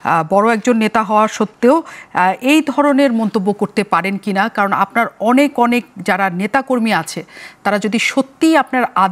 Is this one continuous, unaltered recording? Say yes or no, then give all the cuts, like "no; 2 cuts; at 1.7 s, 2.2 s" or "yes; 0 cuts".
yes; 0 cuts